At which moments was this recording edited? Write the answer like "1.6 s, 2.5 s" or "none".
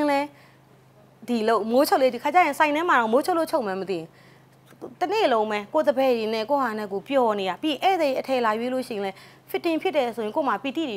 none